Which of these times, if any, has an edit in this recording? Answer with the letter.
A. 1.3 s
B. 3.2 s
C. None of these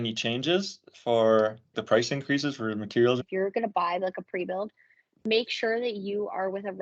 B